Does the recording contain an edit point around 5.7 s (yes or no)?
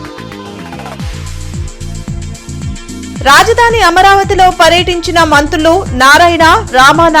no